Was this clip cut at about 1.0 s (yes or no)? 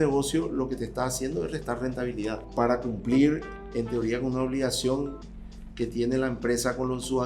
no